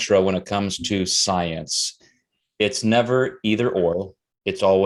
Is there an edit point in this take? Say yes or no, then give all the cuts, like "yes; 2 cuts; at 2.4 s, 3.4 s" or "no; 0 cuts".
no; 0 cuts